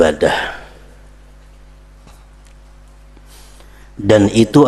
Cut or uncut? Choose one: uncut